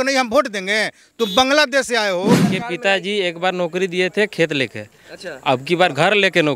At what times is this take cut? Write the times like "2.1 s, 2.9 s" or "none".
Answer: 2.4 s